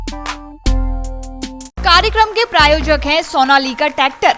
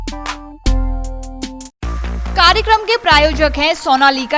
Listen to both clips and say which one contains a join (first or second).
first